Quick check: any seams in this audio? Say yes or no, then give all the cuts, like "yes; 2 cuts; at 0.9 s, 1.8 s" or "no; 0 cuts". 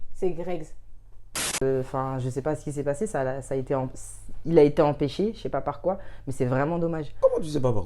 yes; 1 cut; at 1.6 s